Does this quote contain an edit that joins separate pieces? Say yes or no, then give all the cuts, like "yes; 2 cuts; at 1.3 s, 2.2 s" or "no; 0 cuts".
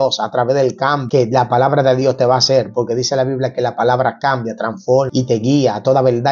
yes; 2 cuts; at 1.0 s, 5.1 s